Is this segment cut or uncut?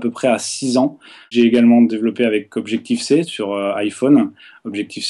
cut